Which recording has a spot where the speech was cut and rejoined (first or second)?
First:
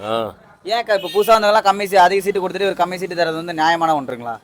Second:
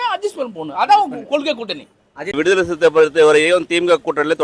second